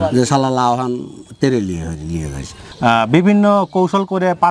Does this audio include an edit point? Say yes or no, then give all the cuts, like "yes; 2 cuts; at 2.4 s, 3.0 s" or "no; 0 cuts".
yes; 1 cut; at 2.6 s